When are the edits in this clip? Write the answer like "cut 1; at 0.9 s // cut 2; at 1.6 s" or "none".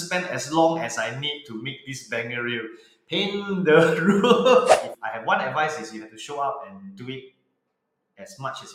cut 1; at 4.8 s